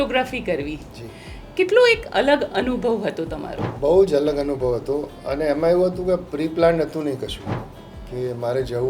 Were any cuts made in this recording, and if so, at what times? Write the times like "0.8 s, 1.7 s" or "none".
3.7 s